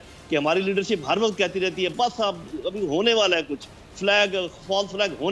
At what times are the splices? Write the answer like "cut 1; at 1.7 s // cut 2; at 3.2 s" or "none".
none